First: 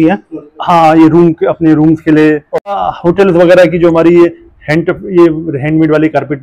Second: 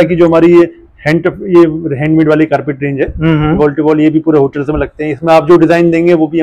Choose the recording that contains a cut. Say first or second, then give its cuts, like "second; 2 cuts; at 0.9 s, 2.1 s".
first; 1 cut; at 2.7 s